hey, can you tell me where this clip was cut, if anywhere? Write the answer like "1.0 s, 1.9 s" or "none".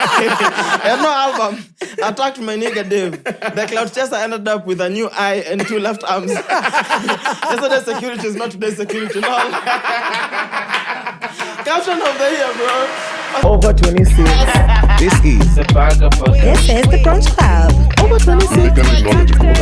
13.4 s